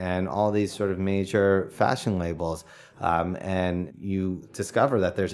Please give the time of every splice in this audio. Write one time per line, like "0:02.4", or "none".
0:04.1